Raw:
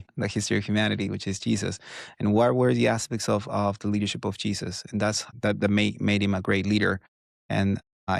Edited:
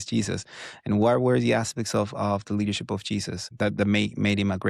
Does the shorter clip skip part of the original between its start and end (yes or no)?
yes